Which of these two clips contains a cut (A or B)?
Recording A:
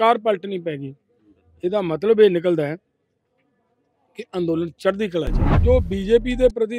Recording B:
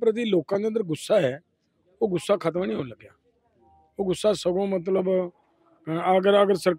A